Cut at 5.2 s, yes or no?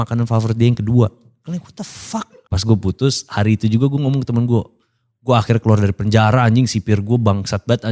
no